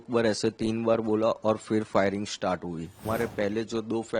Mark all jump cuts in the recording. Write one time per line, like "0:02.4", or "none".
0:03.0

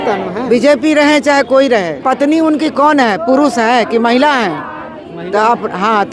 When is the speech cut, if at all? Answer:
0:02.0

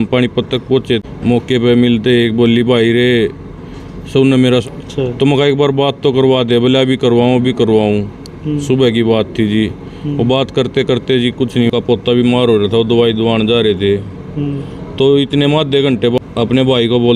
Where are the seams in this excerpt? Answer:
0:01.0
0:04.6
0:11.7
0:16.2

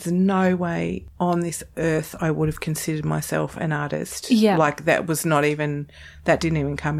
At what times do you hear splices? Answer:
0:01.1

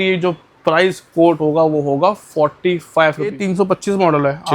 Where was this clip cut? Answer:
0:03.4

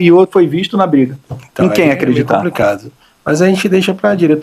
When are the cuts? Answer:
none

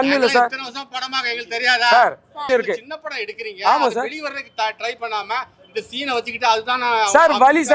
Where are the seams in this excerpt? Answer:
0:02.4

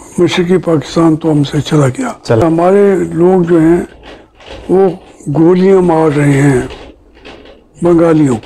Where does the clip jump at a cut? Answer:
0:02.4

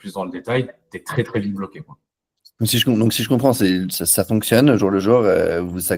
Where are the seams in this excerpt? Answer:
none

